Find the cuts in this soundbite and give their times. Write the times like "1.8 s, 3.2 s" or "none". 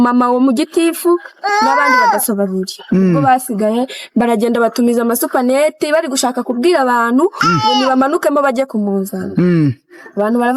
none

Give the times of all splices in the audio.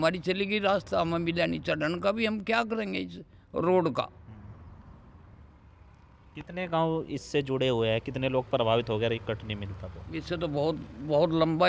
none

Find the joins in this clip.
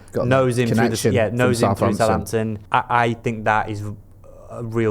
2.6 s

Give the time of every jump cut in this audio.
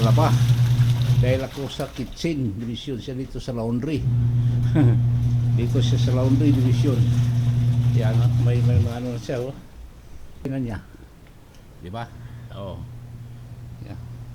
10.5 s

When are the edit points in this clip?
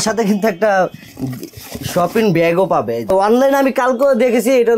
3.1 s

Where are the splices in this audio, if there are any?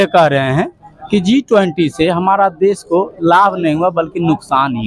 none

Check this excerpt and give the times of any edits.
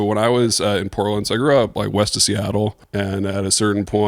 2.8 s

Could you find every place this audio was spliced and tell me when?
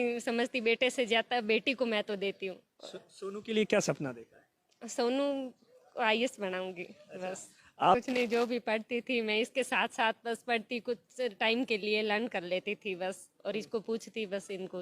8.0 s

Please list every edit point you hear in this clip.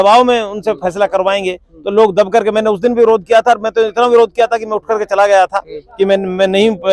none

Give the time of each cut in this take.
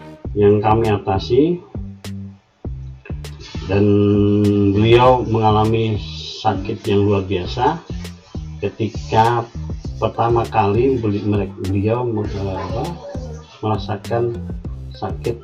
1.7 s, 3.2 s

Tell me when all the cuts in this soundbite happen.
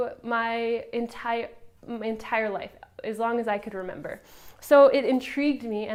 none

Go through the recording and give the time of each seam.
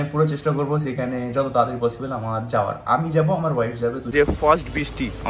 4.1 s

